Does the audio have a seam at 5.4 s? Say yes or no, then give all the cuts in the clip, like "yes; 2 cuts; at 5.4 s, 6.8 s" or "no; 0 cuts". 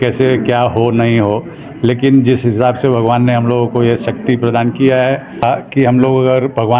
yes; 1 cut; at 5.4 s